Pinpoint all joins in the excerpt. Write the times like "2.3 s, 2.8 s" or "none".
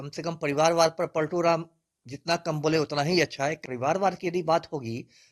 3.6 s